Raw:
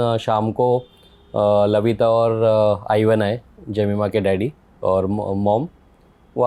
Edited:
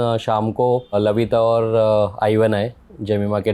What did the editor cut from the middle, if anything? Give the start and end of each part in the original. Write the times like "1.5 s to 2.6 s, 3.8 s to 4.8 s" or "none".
0.9 s to 1.6 s